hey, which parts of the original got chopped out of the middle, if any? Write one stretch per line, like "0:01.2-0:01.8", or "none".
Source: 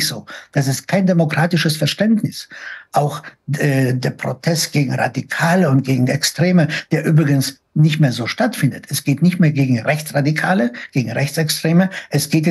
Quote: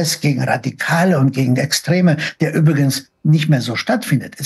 none